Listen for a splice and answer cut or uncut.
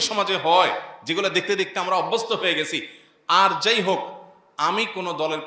uncut